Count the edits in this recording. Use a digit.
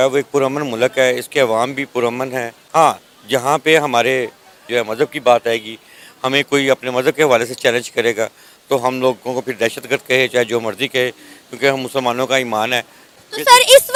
0